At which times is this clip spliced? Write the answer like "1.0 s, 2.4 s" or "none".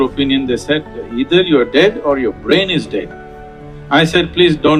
none